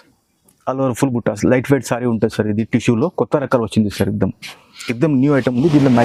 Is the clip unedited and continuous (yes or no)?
yes